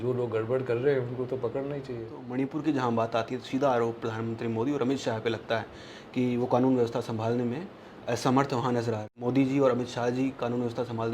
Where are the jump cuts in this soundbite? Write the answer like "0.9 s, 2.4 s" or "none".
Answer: 2.2 s, 9.1 s